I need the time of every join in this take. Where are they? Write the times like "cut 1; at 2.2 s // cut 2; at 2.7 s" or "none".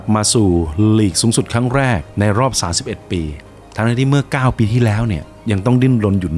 cut 1; at 3.4 s